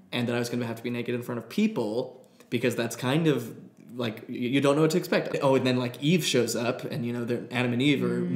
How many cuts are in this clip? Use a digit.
1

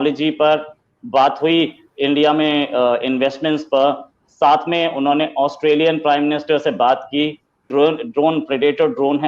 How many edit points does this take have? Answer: 1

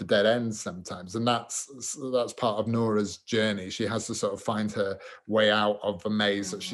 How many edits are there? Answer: 0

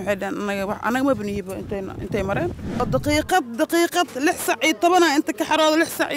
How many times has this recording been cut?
1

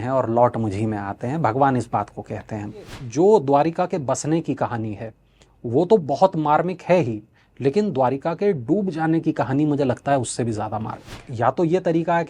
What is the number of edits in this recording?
2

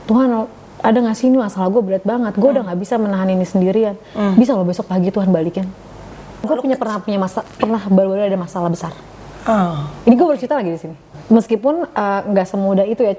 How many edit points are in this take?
2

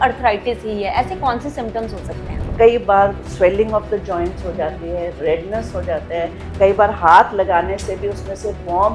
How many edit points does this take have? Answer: 1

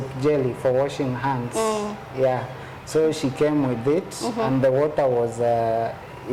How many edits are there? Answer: 0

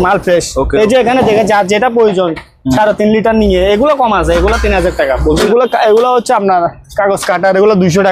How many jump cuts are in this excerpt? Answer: 1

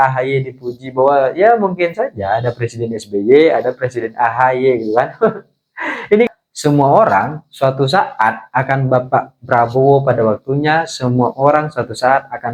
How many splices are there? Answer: 1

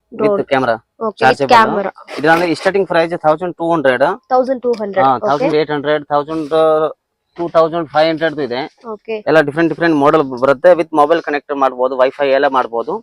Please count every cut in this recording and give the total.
0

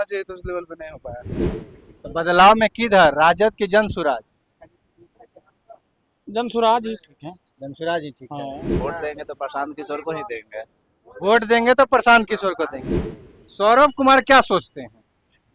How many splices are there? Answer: 3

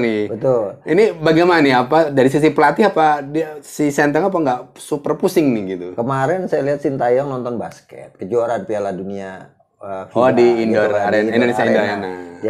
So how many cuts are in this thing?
0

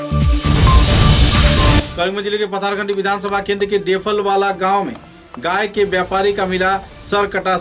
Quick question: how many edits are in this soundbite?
1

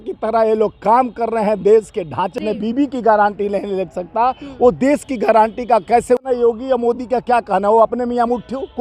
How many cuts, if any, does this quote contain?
2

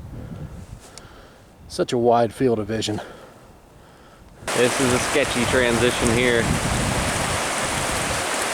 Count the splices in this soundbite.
1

